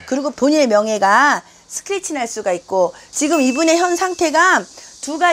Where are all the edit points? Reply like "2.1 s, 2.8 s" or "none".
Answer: 3.0 s